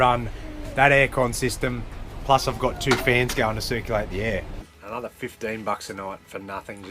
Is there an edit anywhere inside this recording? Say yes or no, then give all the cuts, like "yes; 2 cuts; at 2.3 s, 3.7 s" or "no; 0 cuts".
yes; 1 cut; at 4.6 s